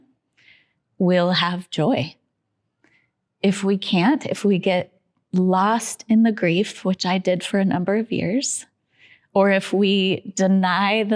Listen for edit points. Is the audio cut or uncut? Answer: uncut